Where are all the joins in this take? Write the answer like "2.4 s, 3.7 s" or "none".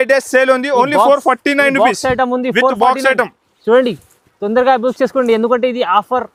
none